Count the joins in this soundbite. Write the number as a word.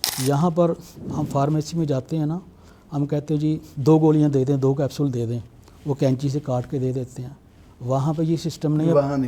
one